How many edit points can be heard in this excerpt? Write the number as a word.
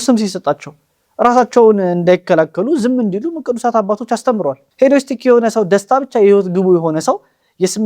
one